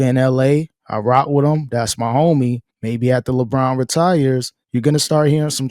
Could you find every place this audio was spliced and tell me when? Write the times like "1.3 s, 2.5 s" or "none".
none